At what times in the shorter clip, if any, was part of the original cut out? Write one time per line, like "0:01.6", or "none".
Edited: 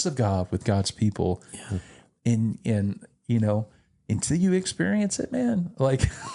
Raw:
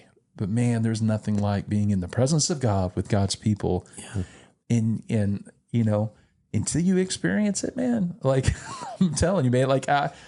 none